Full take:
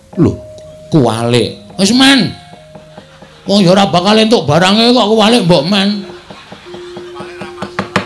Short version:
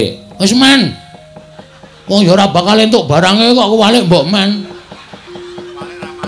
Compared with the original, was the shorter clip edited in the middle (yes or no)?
no